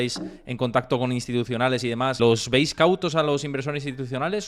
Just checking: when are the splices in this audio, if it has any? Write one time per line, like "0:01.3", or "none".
0:02.2